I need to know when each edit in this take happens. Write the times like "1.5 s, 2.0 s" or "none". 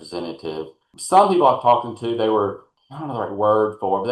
0.9 s, 2.7 s